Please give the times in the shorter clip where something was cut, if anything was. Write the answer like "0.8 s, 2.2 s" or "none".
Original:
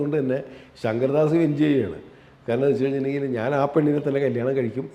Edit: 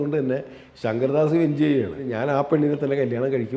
2.0 s